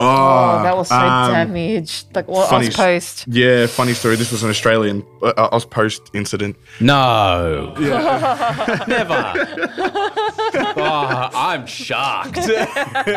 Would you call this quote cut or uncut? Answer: uncut